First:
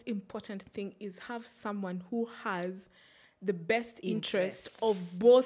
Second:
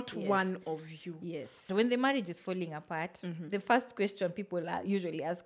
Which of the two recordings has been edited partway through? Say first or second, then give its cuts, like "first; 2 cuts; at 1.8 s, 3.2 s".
second; 1 cut; at 1.6 s